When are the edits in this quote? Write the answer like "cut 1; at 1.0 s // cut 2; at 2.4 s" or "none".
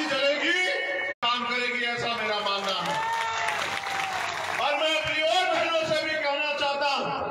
cut 1; at 1.2 s